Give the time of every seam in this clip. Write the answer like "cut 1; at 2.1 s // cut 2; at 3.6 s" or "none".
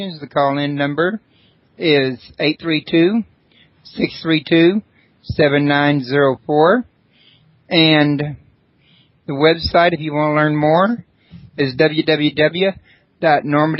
cut 1; at 10.7 s